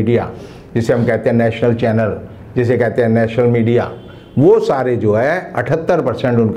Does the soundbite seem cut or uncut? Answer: uncut